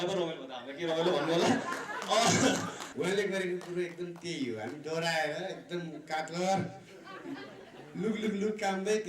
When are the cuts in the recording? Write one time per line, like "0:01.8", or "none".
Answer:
0:02.8